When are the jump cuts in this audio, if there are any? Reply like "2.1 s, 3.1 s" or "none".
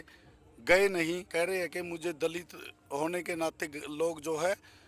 1.3 s